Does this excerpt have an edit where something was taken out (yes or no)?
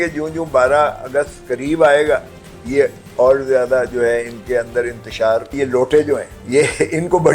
yes